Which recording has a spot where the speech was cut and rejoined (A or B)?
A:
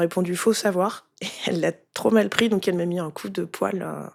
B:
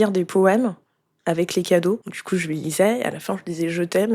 B